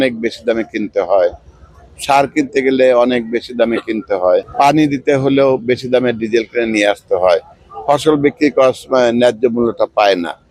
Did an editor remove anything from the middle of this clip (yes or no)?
no